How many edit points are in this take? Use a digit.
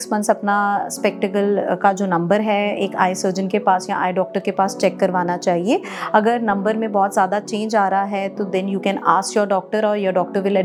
0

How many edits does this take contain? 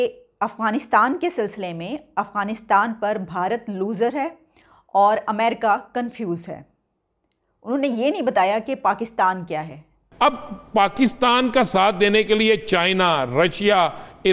1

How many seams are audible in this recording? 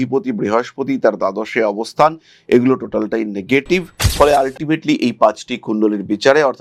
0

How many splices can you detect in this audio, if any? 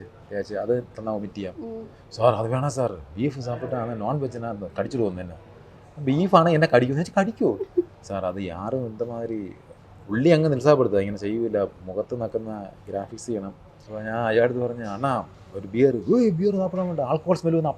1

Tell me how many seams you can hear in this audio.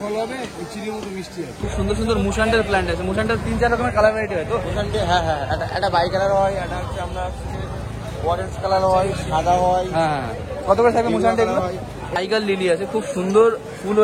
2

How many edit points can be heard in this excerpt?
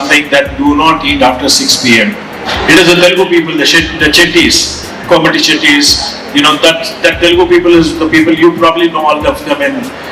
1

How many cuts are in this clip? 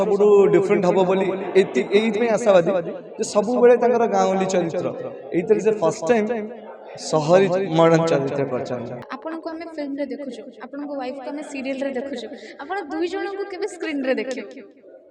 1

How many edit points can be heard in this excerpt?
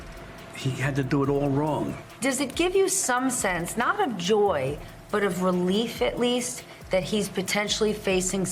1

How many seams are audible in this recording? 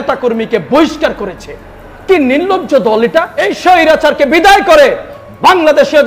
1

